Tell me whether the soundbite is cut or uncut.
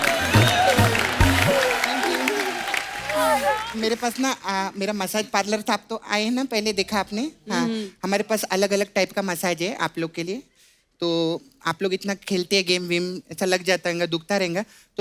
cut